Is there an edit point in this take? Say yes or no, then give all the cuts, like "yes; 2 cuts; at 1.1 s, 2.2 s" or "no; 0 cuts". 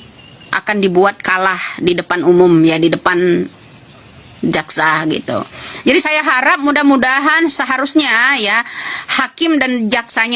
no; 0 cuts